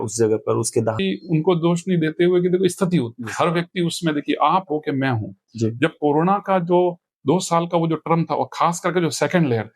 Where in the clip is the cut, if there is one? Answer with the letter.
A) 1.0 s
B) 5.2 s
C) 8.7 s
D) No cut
A